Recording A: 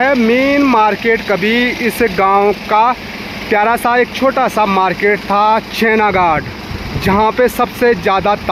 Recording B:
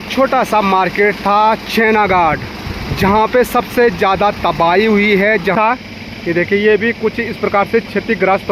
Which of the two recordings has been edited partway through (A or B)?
B